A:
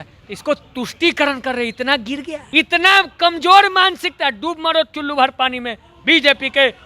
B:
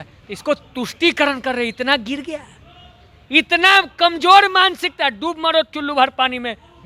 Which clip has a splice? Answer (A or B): A